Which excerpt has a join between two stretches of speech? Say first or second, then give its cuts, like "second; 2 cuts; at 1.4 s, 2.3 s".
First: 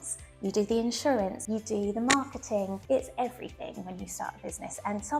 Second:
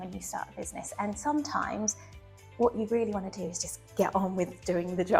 first; 2 cuts; at 1.4 s, 2.8 s